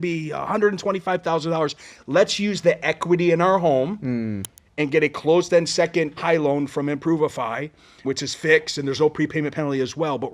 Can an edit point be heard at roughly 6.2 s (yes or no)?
yes